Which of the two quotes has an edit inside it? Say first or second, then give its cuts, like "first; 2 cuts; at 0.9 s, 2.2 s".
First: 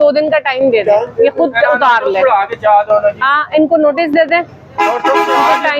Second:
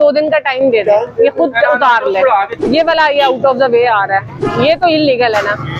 second; 2 cuts; at 2.5 s, 4.4 s